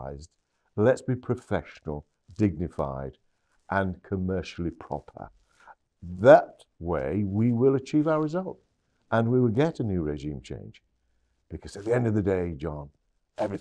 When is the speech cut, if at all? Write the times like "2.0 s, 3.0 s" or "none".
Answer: none